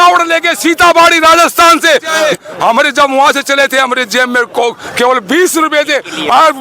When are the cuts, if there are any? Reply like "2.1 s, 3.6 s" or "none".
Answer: 2.2 s

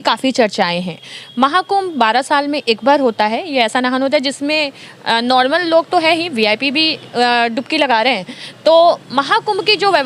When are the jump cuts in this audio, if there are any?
none

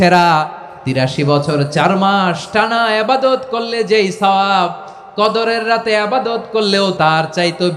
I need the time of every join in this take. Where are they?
1.0 s, 6.9 s

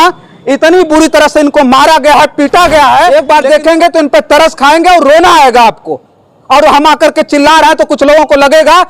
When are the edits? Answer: 3.1 s

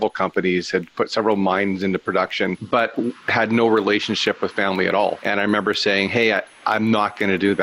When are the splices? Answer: 2.6 s, 5.2 s

